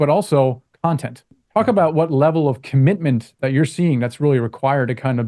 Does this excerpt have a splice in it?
yes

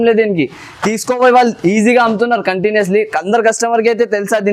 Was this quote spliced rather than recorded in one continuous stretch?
no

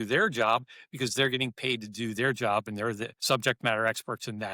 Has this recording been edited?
yes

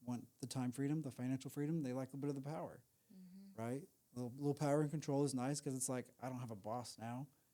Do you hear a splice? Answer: no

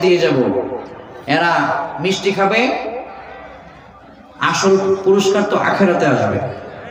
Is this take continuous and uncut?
yes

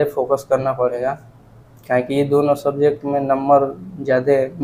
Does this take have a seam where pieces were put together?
no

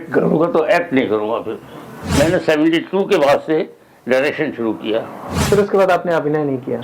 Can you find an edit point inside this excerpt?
yes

